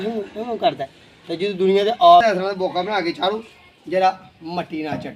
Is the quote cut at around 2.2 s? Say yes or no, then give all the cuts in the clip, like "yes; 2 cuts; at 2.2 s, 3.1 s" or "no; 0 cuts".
yes; 1 cut; at 2.2 s